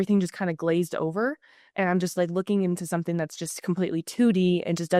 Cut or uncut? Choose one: uncut